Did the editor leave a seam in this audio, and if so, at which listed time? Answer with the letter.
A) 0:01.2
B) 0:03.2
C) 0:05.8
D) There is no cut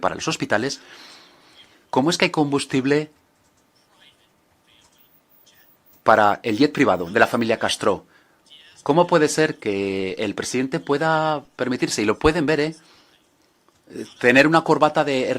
D